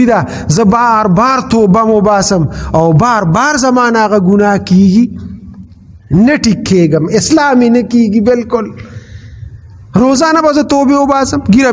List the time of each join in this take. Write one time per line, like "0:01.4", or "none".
none